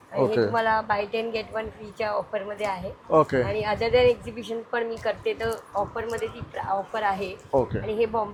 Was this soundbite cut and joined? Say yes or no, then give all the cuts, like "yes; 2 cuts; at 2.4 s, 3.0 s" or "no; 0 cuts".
no; 0 cuts